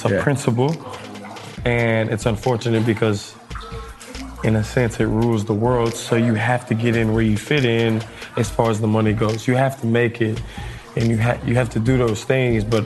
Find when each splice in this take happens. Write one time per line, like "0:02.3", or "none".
none

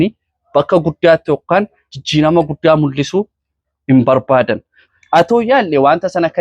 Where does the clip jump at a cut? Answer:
0:04.8

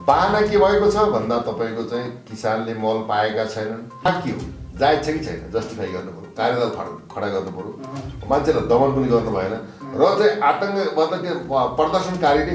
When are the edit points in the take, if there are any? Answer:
0:04.1

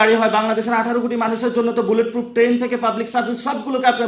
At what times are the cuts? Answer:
none

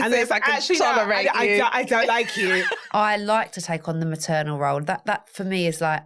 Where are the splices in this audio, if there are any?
0:02.8

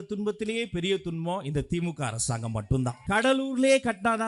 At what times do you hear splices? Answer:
0:03.0

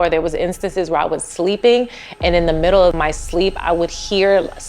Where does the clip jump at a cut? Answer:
0:03.0

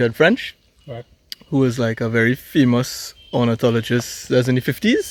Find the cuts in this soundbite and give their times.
none

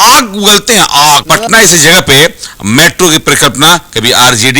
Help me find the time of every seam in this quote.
0:01.2

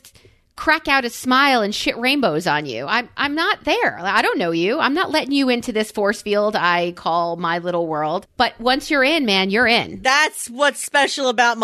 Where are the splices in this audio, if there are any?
0:08.3
0:10.0

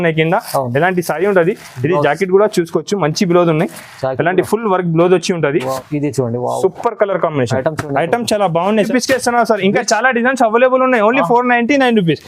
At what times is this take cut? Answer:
0:05.8
0:08.8

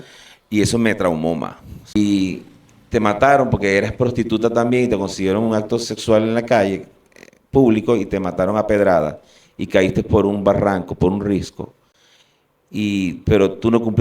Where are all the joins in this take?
0:01.9

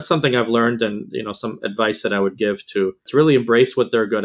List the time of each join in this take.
0:03.0

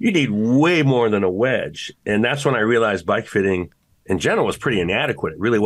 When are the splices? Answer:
none

